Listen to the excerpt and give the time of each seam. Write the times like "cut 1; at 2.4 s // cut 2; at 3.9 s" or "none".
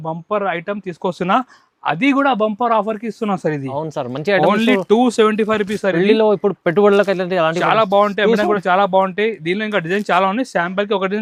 none

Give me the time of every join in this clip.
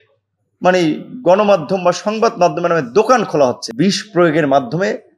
cut 1; at 3.6 s

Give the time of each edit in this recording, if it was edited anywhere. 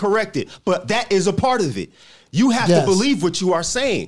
none

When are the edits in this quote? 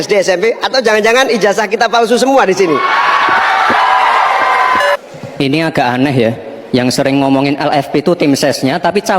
cut 1; at 4.9 s

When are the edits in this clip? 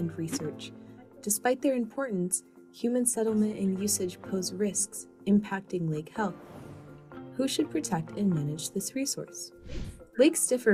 cut 1; at 9.1 s

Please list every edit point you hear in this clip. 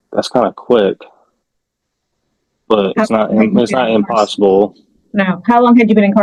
none

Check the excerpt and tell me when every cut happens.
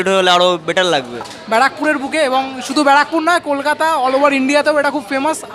cut 1; at 1.4 s

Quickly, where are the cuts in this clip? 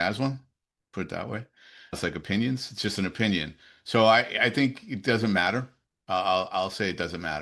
none

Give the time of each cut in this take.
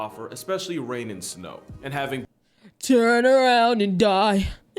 cut 1; at 2.2 s

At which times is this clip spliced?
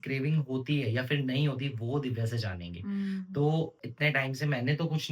cut 1; at 3.8 s

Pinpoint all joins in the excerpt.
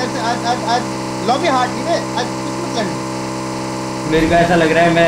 none

